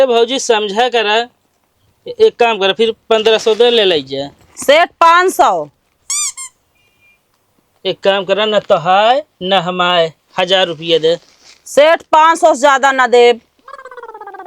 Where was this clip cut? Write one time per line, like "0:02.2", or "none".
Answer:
0:13.5